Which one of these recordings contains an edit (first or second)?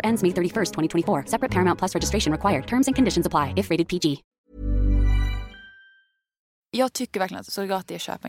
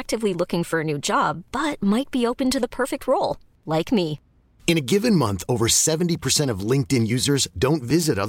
first